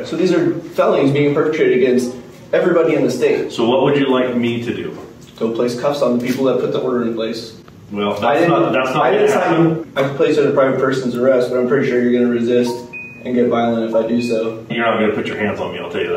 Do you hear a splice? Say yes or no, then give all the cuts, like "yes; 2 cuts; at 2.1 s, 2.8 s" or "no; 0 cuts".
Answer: yes; 2 cuts; at 9.8 s, 14.7 s